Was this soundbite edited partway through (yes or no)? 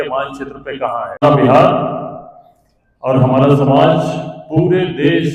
no